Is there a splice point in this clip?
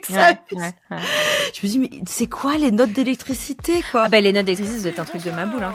no; 0 cuts

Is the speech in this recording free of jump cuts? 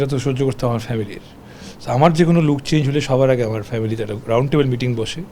yes; 0 cuts

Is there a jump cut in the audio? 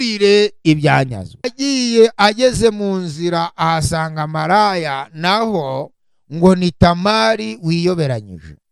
yes; 1 cut; at 1.5 s

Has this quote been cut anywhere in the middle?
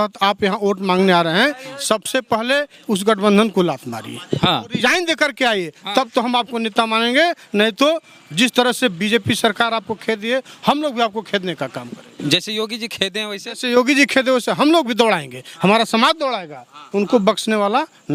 no; 0 cuts

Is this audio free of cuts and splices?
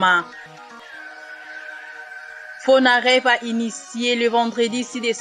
no; 2 cuts; at 0.9 s, 2.6 s

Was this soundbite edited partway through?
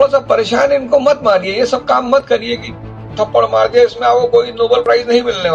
no; 0 cuts

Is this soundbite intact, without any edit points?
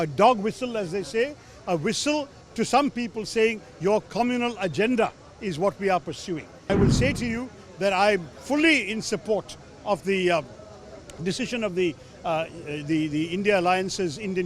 no; 1 cut; at 6.7 s

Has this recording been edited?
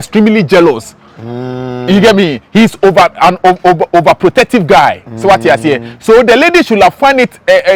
no; 0 cuts

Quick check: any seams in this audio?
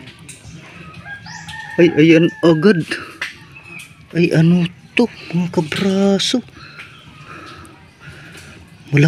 no; 0 cuts

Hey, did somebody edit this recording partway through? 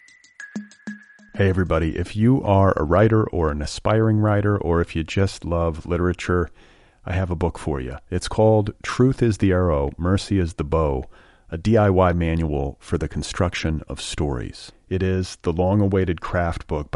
yes; 1 cut; at 0.9 s

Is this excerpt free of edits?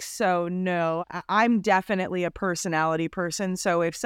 no; 1 cut; at 1.0 s

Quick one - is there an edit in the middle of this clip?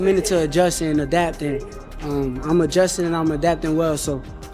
no; 0 cuts

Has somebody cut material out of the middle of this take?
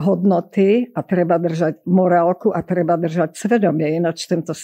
no; 0 cuts

